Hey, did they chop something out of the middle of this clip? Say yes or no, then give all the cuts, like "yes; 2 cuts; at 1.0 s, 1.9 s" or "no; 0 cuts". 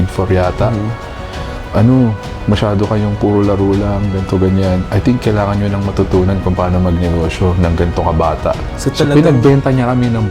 no; 0 cuts